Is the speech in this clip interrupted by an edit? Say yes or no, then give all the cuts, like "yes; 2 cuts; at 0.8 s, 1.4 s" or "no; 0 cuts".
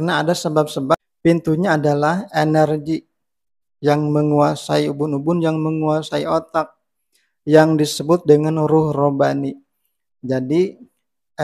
yes; 1 cut; at 0.9 s